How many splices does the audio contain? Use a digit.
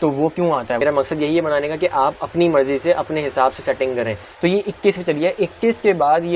2